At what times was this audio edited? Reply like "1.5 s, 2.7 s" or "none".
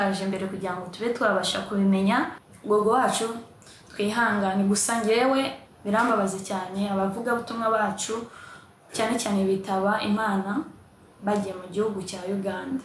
2.5 s, 5.6 s